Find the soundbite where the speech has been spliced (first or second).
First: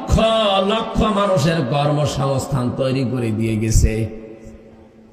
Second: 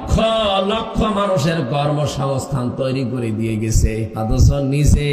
second